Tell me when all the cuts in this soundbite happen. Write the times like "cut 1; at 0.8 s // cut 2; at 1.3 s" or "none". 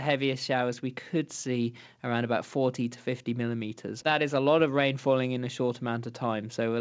cut 1; at 4.0 s